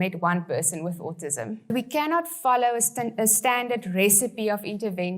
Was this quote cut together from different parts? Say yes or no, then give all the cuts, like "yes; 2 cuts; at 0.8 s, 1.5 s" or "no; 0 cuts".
yes; 1 cut; at 1.7 s